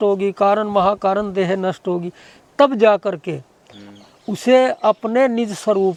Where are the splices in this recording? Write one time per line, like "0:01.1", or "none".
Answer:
none